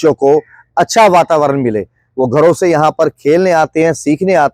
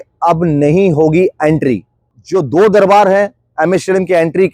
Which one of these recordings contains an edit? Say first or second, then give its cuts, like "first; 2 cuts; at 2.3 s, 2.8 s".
second; 1 cut; at 2.1 s